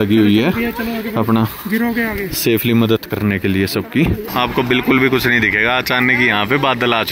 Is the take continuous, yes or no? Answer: no